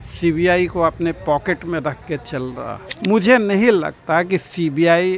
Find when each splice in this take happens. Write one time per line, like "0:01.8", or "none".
0:02.8